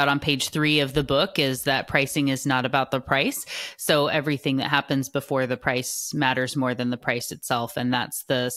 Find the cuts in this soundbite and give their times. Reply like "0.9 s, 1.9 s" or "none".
none